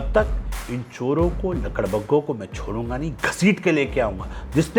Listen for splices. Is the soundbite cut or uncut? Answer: uncut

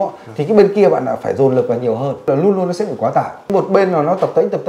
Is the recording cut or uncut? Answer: cut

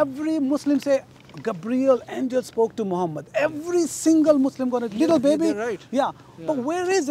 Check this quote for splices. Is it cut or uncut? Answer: uncut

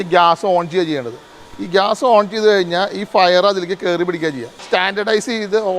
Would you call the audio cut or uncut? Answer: cut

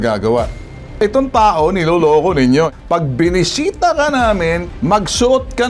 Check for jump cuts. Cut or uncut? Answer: cut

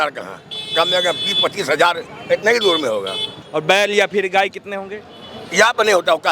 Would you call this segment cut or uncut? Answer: cut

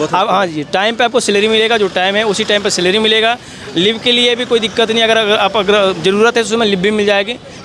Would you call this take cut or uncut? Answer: uncut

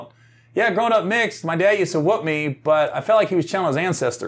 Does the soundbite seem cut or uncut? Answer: uncut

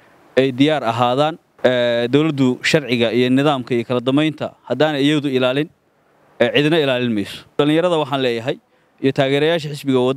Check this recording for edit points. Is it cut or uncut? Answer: cut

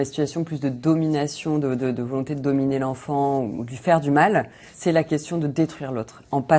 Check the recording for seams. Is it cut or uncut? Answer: cut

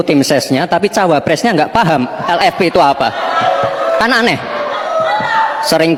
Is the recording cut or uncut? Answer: uncut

